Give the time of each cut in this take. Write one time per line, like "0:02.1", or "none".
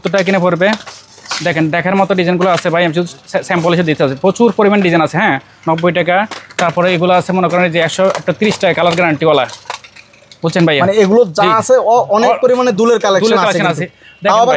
none